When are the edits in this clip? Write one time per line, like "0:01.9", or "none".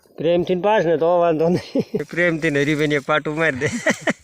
0:02.1